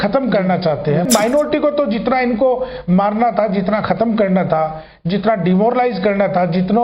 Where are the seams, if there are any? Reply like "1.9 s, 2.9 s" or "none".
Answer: 1.1 s